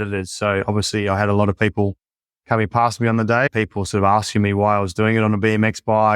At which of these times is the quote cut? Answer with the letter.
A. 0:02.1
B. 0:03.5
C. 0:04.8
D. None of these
B